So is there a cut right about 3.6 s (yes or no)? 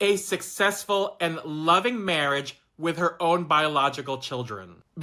no